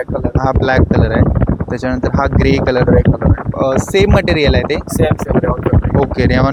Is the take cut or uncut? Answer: uncut